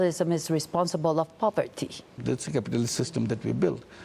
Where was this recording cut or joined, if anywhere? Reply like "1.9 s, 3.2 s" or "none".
2.1 s